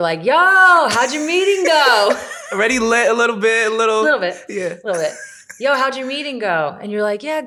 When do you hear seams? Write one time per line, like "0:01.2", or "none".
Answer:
none